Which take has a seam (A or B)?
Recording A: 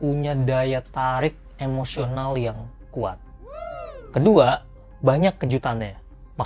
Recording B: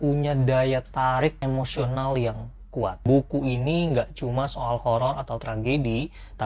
B